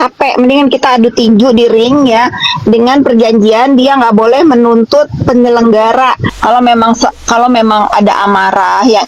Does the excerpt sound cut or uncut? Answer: cut